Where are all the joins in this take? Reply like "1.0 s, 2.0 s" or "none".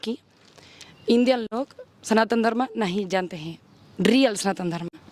none